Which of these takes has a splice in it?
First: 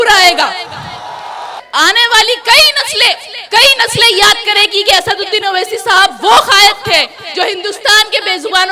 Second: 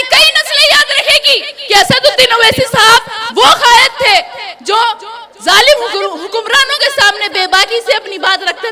first; 1 cut; at 1.6 s

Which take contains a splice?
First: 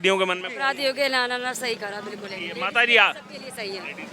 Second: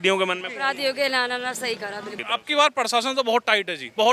second; 1 cut; at 2.2 s

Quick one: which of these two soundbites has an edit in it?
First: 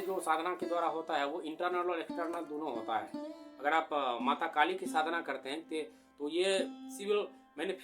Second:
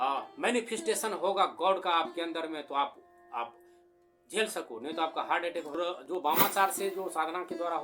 second; 1 cut; at 5.9 s

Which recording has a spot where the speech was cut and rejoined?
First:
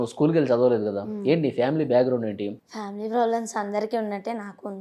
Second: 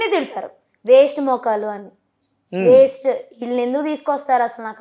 first; 1 cut; at 2.6 s

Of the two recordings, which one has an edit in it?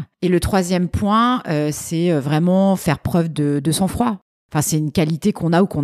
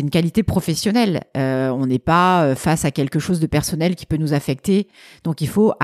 first; 1 cut; at 4.3 s

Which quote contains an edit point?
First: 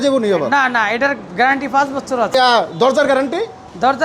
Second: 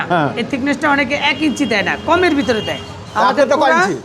first; 1 cut; at 2.3 s

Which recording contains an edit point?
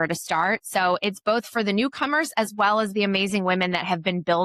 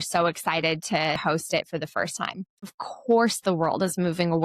second; 2 cuts; at 1.2 s, 2.6 s

